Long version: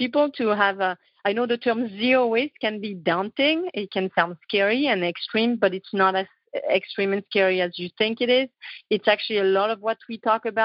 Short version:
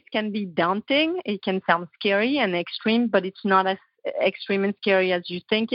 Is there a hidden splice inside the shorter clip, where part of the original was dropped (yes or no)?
no